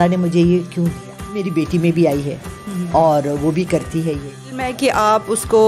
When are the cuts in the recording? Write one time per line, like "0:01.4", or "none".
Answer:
0:01.4
0:04.6